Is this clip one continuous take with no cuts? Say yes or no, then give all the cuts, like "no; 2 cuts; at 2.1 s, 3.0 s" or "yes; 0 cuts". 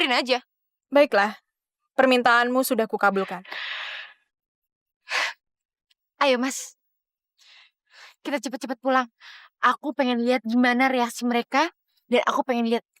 no; 1 cut; at 3.5 s